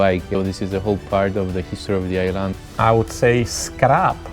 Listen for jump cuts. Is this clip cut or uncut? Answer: cut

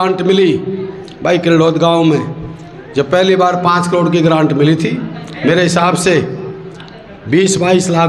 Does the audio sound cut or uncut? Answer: uncut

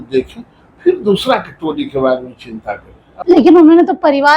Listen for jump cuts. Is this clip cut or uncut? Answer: cut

